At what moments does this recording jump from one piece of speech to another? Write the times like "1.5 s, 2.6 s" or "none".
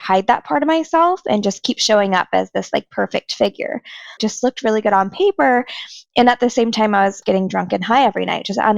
4.2 s, 7.2 s